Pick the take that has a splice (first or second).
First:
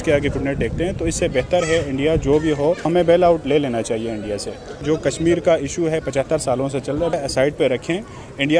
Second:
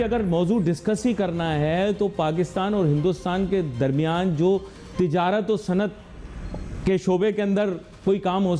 first